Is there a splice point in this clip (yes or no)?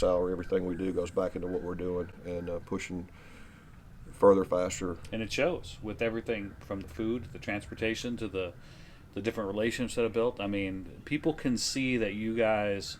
no